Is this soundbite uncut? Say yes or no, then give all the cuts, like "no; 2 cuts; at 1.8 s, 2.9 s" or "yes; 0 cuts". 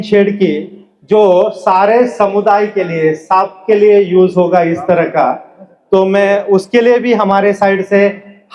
yes; 0 cuts